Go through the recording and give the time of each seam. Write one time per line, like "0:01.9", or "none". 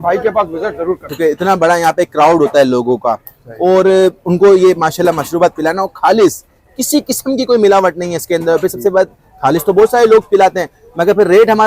0:01.1